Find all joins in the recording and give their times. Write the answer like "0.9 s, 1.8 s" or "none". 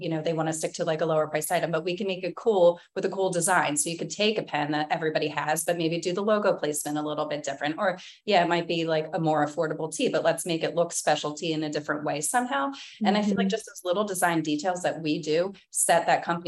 none

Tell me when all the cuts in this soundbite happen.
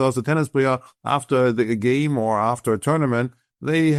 none

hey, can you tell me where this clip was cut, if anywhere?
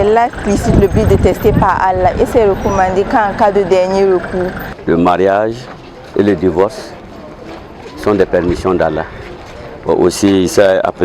4.7 s

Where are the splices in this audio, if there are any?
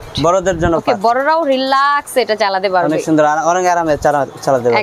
none

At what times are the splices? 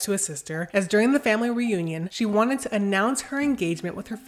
none

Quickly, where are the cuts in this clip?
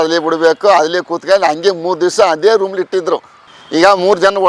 3.4 s

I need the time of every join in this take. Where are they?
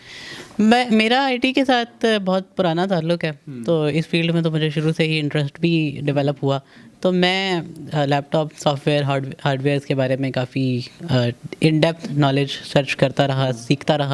none

